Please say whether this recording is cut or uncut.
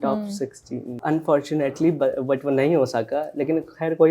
cut